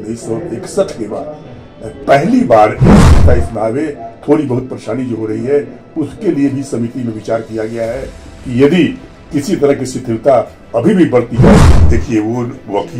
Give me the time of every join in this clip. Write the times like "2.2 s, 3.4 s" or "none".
3.0 s, 11.7 s